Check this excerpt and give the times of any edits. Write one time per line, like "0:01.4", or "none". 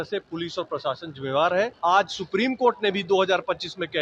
0:01.7